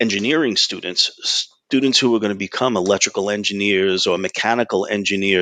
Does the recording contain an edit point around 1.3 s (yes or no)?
no